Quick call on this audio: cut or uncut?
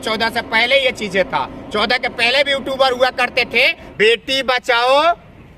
cut